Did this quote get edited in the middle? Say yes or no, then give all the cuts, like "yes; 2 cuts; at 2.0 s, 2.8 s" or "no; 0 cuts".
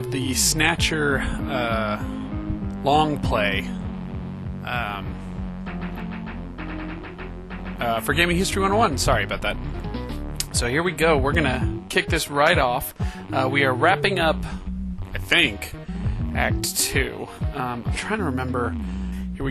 no; 0 cuts